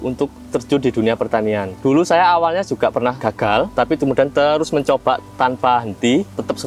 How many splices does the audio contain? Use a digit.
1